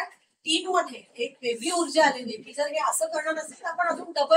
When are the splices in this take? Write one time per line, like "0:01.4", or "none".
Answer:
none